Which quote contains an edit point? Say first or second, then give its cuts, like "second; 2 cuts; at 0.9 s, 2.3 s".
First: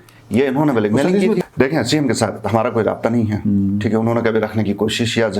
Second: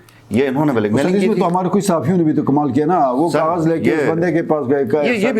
first; 1 cut; at 1.4 s